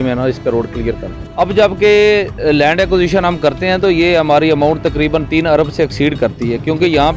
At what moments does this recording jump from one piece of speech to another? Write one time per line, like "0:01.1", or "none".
0:01.3